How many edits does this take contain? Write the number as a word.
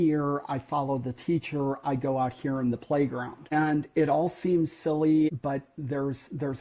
two